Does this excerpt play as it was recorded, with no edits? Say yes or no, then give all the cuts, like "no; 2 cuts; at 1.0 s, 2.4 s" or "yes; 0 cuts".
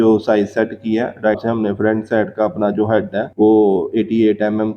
no; 1 cut; at 1.4 s